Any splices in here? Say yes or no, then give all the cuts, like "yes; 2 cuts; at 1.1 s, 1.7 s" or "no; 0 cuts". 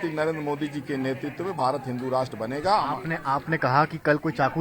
no; 0 cuts